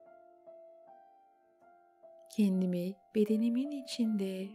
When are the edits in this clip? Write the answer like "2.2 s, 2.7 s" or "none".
2.3 s